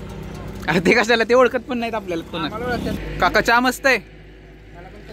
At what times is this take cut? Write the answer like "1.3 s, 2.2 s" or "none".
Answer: 3.0 s